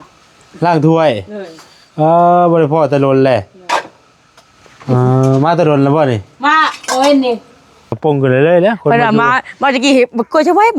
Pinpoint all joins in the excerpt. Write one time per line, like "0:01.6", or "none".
0:08.0